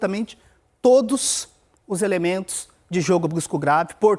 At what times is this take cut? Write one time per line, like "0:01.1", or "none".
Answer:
none

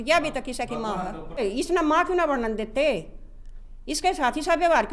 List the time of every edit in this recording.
0:01.4

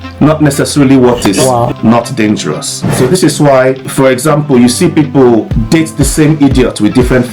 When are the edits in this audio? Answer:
0:02.9
0:03.9
0:05.6

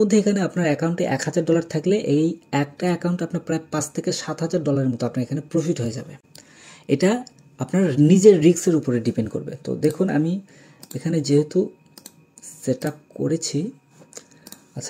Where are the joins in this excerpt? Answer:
none

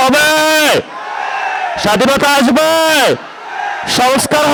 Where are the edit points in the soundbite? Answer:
none

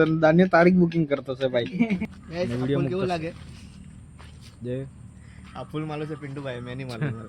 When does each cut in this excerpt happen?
0:02.0

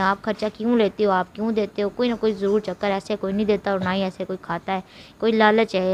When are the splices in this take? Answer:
none

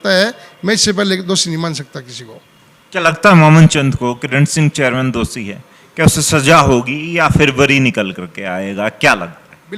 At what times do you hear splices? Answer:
none

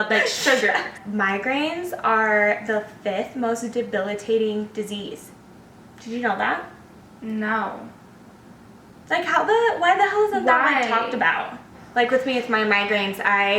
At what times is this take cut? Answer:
0:01.0
0:11.7

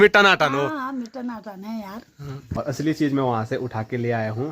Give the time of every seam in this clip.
0:02.6

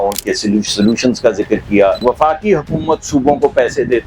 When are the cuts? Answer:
0:02.0

